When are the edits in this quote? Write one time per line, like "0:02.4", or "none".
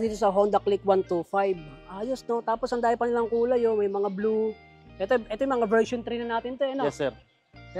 none